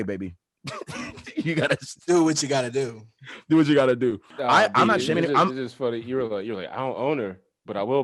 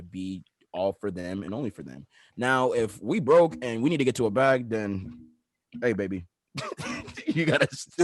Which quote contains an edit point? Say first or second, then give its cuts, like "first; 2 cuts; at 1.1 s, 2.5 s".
first; 1 cut; at 4.3 s